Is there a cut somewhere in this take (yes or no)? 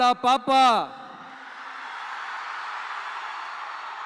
no